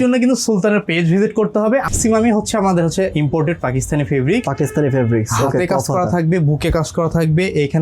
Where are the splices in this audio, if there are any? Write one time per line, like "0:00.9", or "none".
0:01.9